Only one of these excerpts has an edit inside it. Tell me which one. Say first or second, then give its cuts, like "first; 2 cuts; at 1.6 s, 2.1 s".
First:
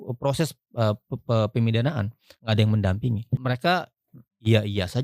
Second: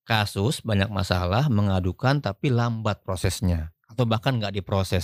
first; 1 cut; at 3.4 s